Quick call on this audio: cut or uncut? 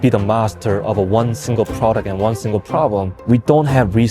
cut